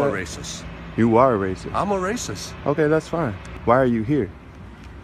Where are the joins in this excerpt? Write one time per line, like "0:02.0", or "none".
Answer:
0:03.1